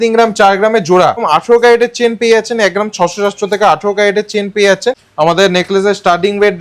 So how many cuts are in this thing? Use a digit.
2